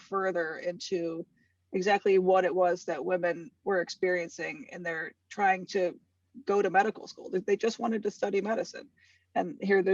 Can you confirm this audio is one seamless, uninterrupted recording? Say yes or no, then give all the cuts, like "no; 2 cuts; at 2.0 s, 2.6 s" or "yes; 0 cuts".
yes; 0 cuts